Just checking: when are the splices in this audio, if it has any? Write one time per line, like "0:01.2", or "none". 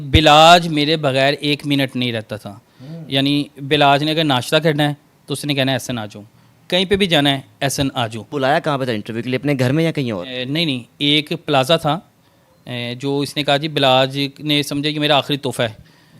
0:08.2